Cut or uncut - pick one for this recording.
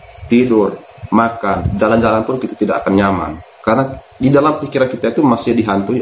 cut